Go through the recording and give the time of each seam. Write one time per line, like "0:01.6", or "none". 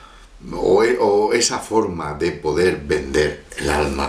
none